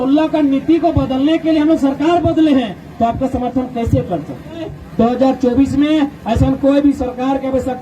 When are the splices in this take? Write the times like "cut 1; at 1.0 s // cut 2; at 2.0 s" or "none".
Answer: cut 1; at 4.8 s